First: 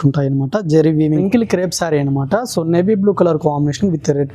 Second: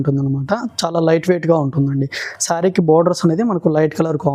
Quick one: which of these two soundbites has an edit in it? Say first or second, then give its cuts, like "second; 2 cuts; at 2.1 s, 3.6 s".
first; 1 cut; at 1.2 s